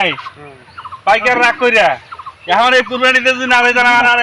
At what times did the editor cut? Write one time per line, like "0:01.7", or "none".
none